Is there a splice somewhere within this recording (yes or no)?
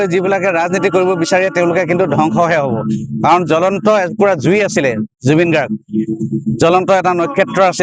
no